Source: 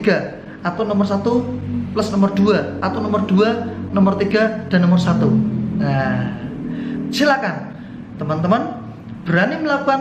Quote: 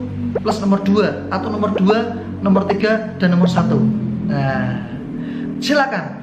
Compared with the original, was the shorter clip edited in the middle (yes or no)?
no